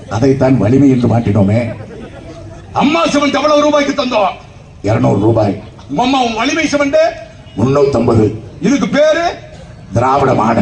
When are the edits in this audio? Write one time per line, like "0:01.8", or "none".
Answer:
none